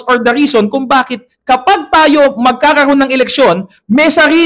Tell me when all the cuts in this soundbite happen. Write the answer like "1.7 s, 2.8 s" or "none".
none